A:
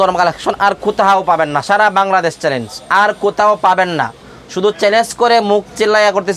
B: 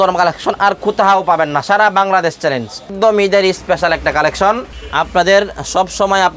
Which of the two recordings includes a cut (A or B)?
B